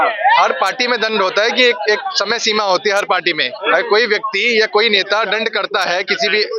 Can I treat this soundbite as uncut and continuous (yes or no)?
yes